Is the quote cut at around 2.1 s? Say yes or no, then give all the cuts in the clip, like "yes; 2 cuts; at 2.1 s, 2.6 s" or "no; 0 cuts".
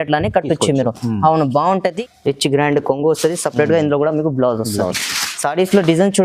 yes; 1 cut; at 2.1 s